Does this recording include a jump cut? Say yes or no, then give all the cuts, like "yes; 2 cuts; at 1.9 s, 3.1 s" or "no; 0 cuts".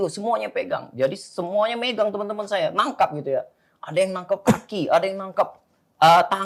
no; 0 cuts